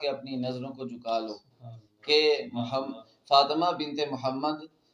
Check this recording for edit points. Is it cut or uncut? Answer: uncut